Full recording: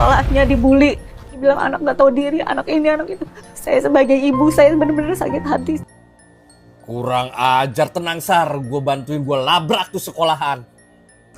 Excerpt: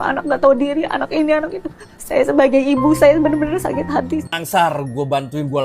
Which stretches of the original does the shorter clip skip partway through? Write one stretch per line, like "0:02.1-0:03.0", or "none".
0:05.9-0:08.1